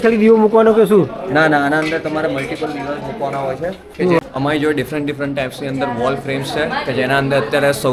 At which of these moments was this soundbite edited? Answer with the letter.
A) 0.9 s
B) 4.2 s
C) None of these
B